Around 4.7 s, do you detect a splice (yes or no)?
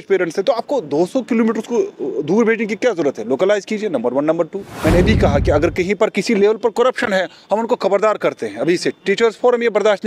yes